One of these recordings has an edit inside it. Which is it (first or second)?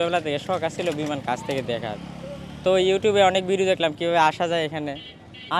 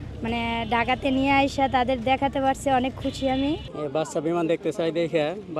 second